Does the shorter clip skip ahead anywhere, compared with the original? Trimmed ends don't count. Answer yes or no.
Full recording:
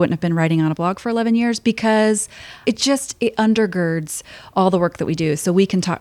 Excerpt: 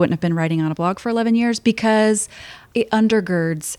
yes